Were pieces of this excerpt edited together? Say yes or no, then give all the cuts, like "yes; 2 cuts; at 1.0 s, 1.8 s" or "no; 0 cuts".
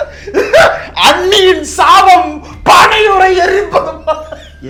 no; 0 cuts